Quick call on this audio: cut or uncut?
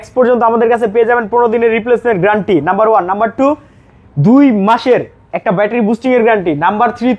uncut